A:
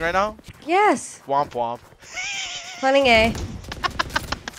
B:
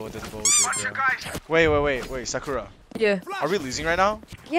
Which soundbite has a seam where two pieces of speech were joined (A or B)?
B